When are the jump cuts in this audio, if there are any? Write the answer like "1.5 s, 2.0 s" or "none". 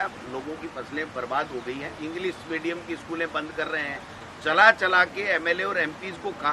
1.9 s